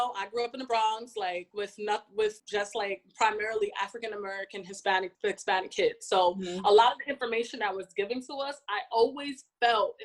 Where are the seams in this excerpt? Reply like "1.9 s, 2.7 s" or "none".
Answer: 1.5 s, 2.4 s, 5.1 s

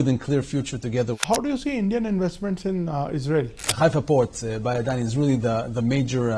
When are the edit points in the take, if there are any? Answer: 1.1 s, 3.7 s

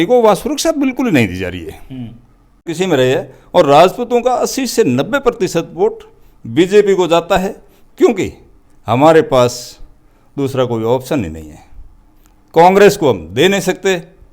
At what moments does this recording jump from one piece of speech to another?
2.7 s

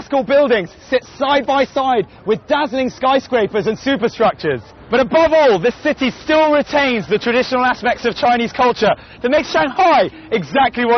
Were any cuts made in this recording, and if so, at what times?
5.5 s

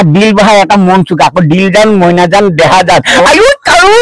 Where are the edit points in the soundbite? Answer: none

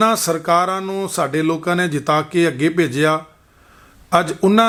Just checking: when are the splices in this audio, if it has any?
none

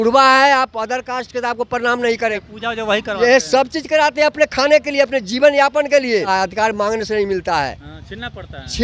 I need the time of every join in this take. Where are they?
2.4 s, 6.3 s

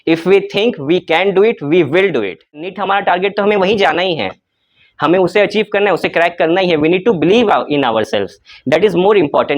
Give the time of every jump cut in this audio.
2.8 s

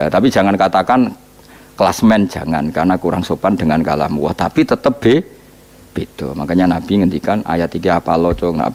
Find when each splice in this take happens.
none

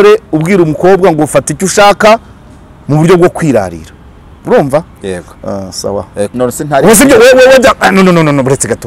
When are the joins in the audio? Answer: 6.3 s

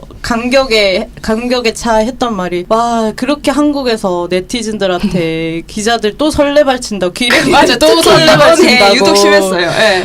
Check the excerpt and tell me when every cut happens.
2.6 s

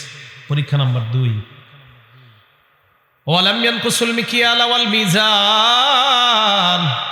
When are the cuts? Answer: none

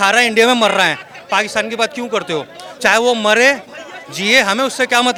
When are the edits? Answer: none

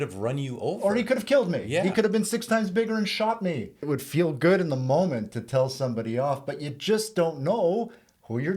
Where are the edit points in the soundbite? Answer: 3.9 s

